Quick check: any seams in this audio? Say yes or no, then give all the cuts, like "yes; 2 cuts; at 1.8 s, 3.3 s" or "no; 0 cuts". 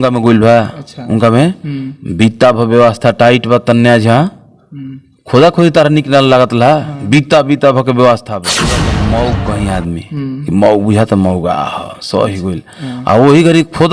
yes; 1 cut; at 8.8 s